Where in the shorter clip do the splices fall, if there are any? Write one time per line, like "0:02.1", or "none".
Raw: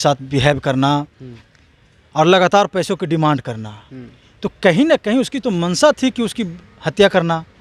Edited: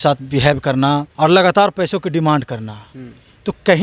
0:01.1